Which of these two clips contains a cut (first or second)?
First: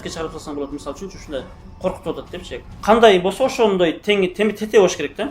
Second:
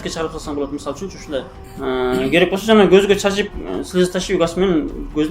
second